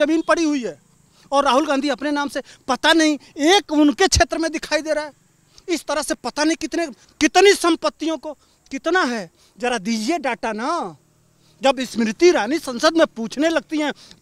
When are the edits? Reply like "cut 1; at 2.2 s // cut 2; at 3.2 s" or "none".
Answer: cut 1; at 7.0 s